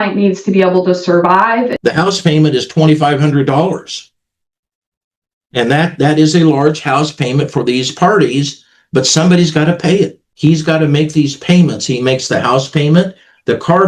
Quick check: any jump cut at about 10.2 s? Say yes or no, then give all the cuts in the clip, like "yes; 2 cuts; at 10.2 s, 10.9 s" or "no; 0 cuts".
yes; 2 cuts; at 1.7 s, 10.2 s